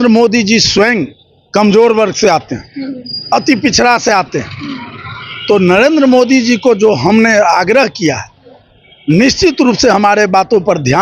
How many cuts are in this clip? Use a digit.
0